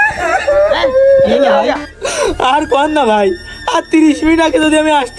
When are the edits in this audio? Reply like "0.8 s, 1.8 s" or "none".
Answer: 2.0 s